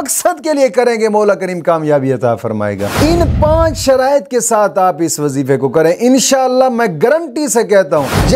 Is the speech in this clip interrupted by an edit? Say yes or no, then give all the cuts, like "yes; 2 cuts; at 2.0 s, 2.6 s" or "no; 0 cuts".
yes; 1 cut; at 2.9 s